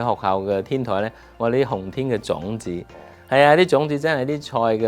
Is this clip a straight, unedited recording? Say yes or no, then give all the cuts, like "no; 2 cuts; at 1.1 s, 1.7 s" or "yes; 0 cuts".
yes; 0 cuts